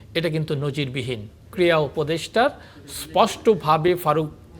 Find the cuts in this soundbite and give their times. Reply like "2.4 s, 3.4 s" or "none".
1.5 s